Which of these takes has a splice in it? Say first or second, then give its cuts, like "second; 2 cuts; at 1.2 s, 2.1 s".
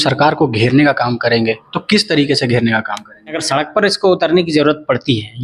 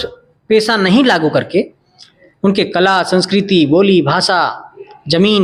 first; 1 cut; at 3.4 s